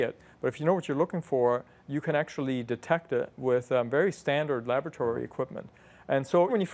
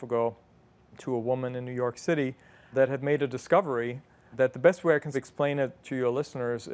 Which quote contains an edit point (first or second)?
second